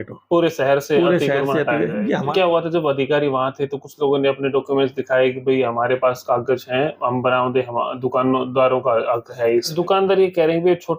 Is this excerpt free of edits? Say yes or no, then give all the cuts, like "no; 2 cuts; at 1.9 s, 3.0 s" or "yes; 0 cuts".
no; 2 cuts; at 2.3 s, 9.7 s